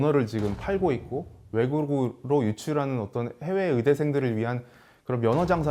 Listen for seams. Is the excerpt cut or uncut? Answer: uncut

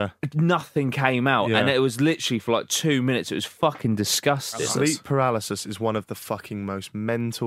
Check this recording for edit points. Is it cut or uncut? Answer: cut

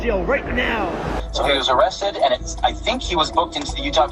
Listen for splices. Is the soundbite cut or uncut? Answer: uncut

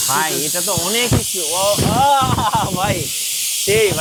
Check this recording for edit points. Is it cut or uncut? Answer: uncut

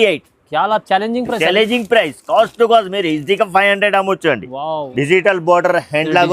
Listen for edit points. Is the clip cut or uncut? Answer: cut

